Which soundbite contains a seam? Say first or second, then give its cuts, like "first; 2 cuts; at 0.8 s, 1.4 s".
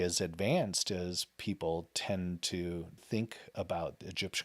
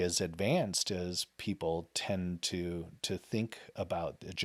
first; 1 cut; at 3.0 s